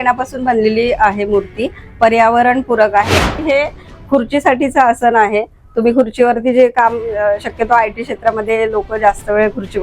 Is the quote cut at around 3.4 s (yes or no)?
yes